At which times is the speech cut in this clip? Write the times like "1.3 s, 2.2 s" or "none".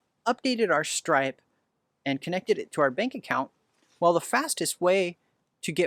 none